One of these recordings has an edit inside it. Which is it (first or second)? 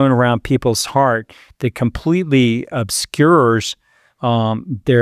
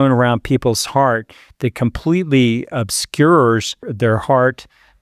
second